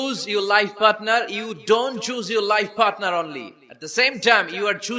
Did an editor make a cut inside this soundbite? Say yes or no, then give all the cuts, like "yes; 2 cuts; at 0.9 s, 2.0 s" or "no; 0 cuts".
no; 0 cuts